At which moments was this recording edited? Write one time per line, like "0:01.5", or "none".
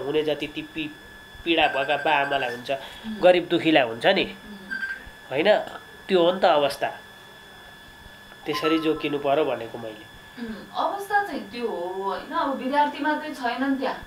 none